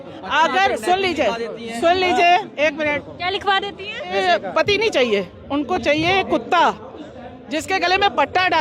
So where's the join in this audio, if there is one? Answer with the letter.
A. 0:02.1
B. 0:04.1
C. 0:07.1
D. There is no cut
B